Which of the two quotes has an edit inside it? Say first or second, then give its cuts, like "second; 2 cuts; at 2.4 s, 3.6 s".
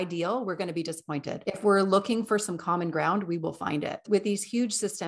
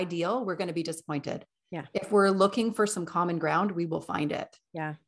first; 2 cuts; at 1.4 s, 4.0 s